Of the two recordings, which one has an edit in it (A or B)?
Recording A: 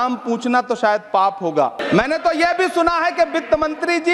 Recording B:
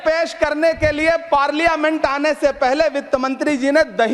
A